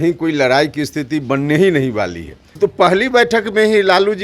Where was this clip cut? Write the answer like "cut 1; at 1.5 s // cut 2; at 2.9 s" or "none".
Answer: cut 1; at 2.5 s